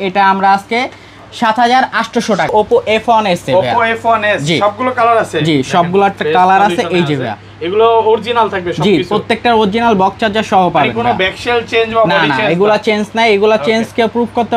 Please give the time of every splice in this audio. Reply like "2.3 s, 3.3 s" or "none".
2.5 s